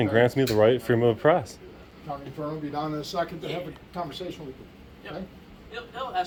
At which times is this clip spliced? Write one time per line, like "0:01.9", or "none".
none